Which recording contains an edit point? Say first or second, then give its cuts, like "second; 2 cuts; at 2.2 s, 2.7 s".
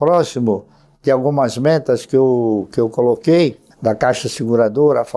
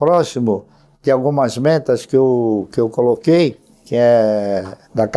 first; 1 cut; at 3.7 s